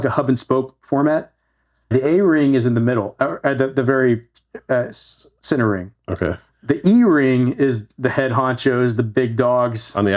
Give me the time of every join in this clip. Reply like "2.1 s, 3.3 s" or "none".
1.9 s, 6.5 s